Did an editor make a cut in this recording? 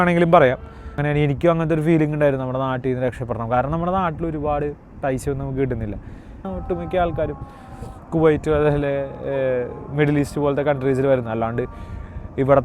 yes; 2 cuts; at 1.0 s, 6.5 s

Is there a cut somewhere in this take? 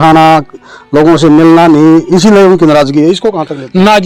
no; 0 cuts

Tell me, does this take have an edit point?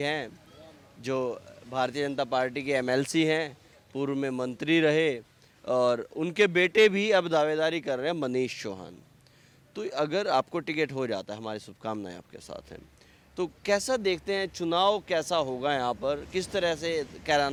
no; 0 cuts

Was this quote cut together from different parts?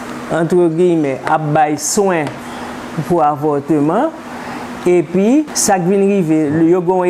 yes; 1 cut; at 5.5 s

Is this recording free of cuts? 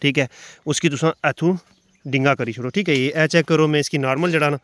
yes; 0 cuts

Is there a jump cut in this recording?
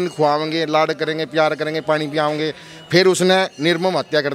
no; 0 cuts

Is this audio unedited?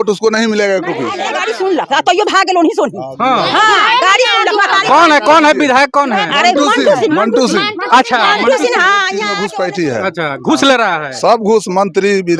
no; 2 cuts; at 1.3 s, 9.3 s

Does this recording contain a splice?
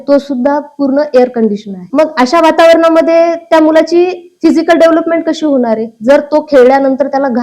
yes; 1 cut; at 1.8 s

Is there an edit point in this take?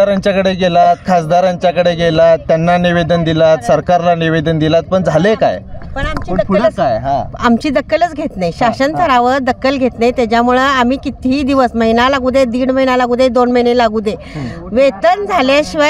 no; 0 cuts

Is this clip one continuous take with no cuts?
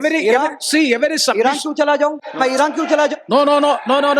no; 1 cut; at 2.2 s

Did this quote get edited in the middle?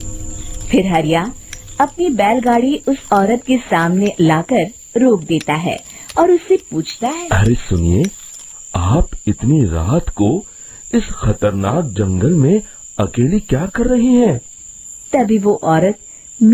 yes; 1 cut; at 7.2 s

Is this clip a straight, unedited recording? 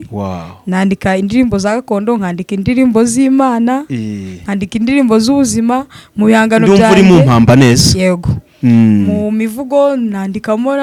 yes; 0 cuts

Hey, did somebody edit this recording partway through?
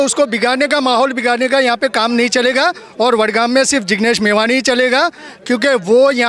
no; 0 cuts

